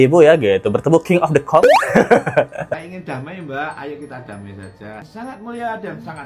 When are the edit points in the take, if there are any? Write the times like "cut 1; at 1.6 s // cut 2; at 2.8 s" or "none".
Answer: none